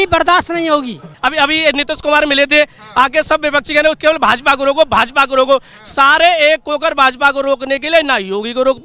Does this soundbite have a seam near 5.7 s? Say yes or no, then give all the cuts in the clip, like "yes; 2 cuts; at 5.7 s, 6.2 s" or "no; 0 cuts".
no; 1 cut; at 1.1 s